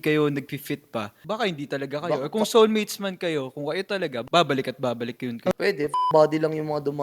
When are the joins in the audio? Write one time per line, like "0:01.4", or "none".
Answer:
0:05.6

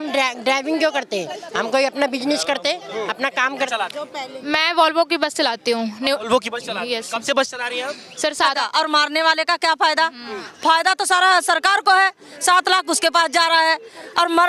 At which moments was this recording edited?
0:03.7
0:08.6

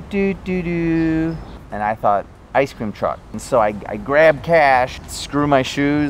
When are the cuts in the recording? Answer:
0:01.6
0:03.4
0:05.0

